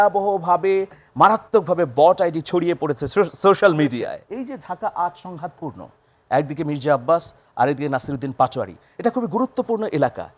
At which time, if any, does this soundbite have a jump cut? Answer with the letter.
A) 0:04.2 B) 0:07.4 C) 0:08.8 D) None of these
A